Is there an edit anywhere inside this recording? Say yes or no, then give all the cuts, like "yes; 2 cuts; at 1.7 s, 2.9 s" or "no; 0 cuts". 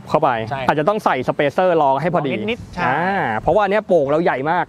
no; 0 cuts